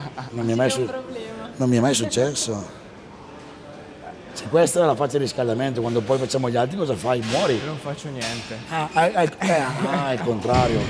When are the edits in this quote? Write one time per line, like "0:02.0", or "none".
none